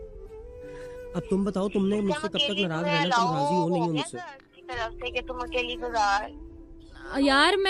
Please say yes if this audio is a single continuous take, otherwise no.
yes